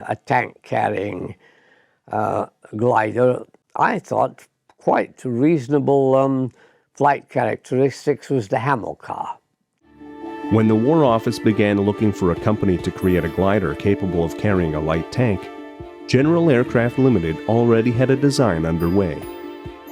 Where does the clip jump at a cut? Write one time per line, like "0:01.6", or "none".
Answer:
0:03.5